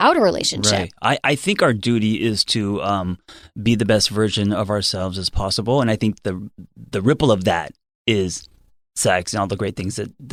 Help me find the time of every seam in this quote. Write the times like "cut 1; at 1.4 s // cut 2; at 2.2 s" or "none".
none